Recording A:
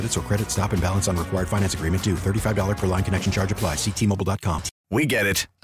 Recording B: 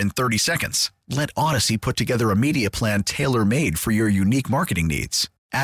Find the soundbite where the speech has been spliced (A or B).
A